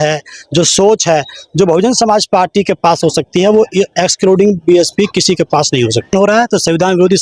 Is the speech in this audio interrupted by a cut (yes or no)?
yes